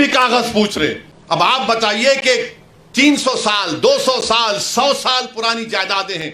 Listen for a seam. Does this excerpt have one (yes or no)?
yes